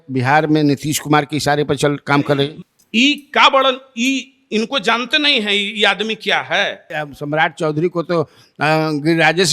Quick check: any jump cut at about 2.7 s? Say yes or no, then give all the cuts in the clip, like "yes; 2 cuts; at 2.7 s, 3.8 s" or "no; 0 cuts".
yes; 2 cuts; at 2.7 s, 6.9 s